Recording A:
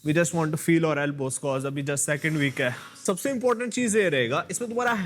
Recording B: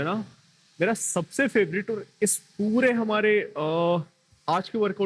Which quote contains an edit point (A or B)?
A